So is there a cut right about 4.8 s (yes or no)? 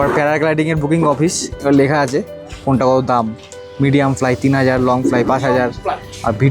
no